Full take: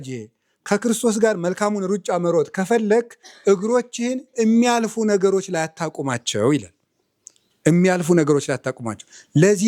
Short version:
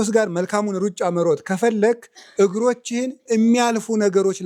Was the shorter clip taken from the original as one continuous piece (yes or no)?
yes